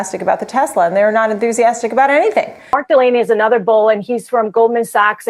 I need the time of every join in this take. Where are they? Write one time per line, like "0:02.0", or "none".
0:02.8